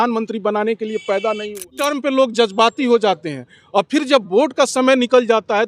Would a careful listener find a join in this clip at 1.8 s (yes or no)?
yes